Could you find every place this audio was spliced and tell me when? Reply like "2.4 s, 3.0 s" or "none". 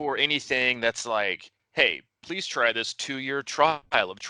1.5 s